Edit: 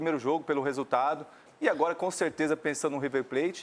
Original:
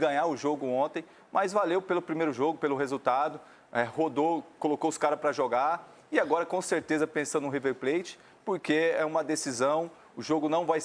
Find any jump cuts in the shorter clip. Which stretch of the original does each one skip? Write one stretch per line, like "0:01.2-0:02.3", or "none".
0:03.6-0:05.9